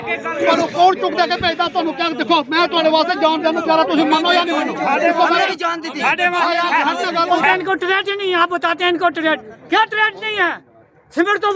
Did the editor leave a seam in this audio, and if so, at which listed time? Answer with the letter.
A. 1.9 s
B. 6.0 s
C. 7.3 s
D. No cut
C